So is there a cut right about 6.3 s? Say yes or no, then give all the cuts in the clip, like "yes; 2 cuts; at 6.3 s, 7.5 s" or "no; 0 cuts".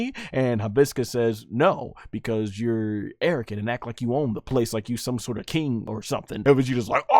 yes; 2 cuts; at 4.4 s, 6.3 s